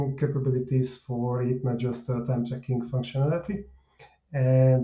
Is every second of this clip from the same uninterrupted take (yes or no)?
yes